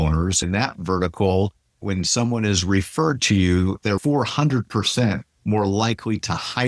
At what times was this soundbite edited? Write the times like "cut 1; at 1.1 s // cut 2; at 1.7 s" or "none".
cut 1; at 1.8 s // cut 2; at 3.8 s